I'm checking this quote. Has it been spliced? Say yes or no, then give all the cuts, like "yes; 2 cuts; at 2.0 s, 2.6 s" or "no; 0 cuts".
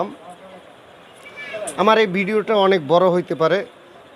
no; 0 cuts